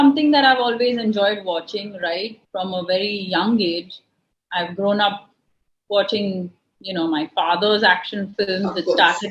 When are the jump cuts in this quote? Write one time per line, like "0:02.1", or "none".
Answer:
0:02.4